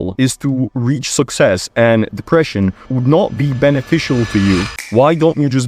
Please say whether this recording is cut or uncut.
uncut